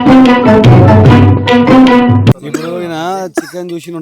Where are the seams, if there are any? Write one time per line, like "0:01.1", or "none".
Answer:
0:02.4